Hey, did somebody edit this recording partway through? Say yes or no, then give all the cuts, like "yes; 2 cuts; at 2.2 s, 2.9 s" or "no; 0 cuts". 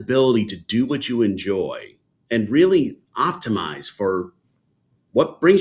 no; 0 cuts